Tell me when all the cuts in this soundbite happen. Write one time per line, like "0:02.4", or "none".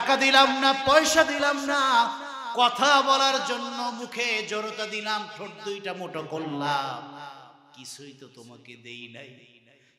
none